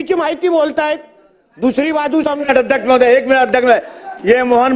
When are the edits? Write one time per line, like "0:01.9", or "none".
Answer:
0:02.4